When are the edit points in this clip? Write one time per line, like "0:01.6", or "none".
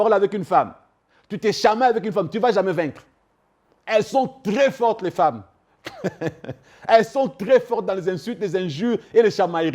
none